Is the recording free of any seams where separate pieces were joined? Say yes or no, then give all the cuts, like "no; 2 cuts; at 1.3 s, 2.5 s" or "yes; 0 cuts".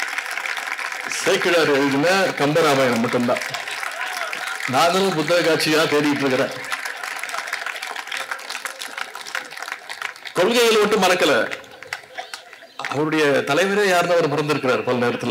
yes; 0 cuts